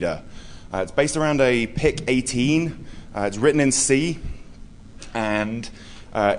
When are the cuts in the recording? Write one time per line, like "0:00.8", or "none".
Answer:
none